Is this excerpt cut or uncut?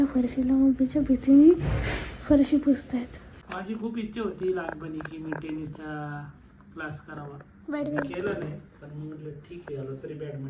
cut